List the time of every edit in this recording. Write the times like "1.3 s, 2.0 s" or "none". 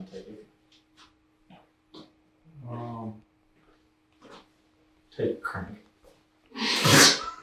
none